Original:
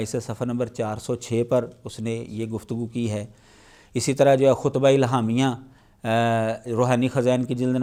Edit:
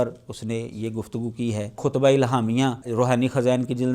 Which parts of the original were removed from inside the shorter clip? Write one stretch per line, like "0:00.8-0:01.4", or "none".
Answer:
0:03.4-0:04.6
0:05.6-0:06.6